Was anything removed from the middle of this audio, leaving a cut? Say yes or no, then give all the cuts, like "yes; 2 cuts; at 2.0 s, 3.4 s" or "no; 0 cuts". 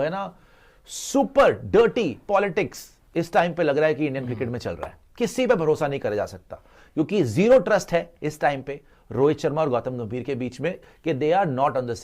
yes; 1 cut; at 10.9 s